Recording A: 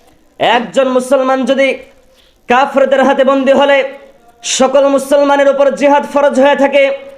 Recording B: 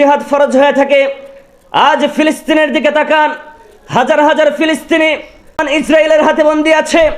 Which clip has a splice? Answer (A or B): B